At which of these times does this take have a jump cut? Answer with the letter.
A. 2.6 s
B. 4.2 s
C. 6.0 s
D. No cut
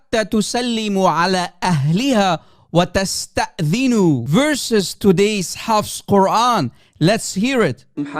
B